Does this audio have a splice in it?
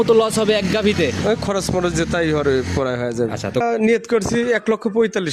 no; 0 cuts

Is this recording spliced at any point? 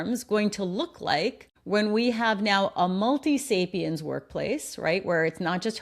yes; 1 cut; at 1.5 s

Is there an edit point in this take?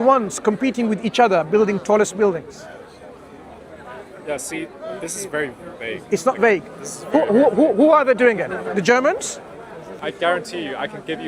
yes; 1 cut; at 10.0 s

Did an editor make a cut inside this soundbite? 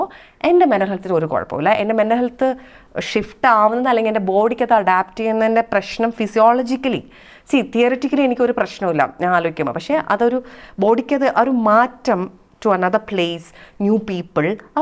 no; 0 cuts

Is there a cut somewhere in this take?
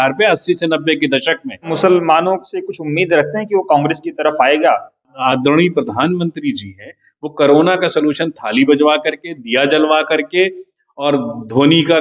yes; 2 cuts; at 1.7 s, 5.1 s

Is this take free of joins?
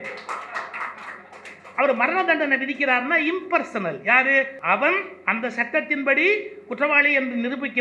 no; 1 cut; at 4.6 s

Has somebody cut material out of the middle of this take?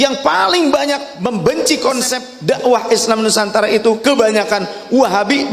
yes; 2 cuts; at 1.1 s, 2.3 s

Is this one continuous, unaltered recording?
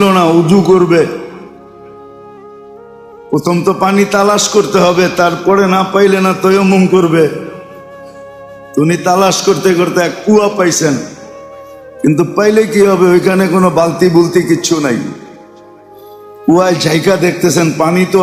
yes; 0 cuts

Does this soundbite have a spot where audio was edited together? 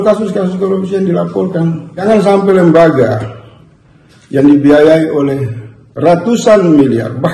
yes; 1 cut; at 2.0 s

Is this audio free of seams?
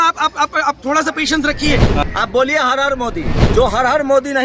no; 2 cuts; at 2.0 s, 3.4 s

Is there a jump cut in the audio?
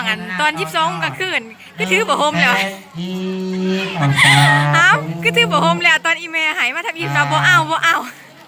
no; 0 cuts

